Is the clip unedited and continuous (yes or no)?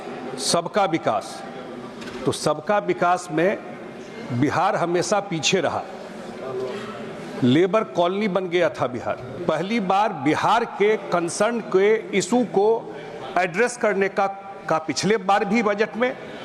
no